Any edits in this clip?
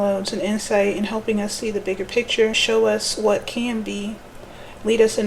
yes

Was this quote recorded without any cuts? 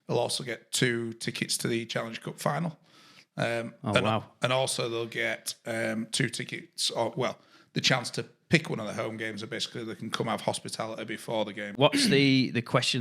no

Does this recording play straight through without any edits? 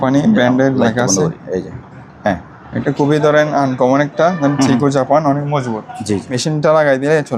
no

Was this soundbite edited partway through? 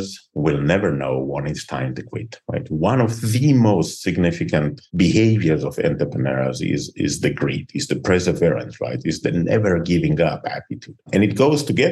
no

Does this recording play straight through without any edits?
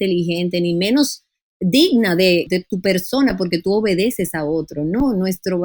no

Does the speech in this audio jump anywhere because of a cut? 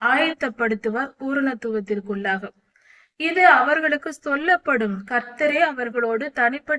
no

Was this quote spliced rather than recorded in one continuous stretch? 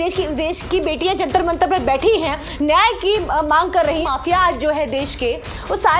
yes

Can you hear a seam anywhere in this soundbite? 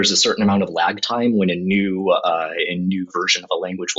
no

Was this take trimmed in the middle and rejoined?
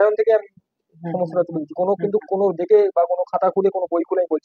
no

